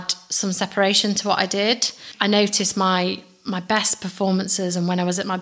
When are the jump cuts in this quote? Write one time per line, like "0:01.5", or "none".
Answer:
0:02.1